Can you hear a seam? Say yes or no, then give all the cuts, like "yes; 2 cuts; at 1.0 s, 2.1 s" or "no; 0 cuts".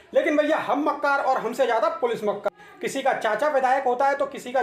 yes; 1 cut; at 2.6 s